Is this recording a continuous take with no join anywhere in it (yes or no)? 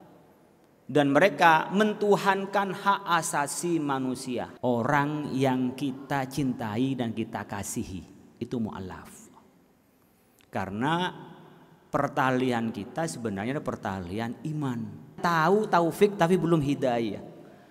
no